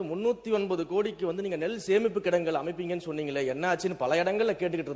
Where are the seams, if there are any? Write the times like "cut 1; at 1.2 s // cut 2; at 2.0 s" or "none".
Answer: none